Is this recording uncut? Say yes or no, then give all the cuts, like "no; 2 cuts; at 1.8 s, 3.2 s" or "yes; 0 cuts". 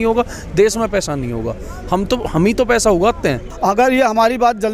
no; 1 cut; at 3.5 s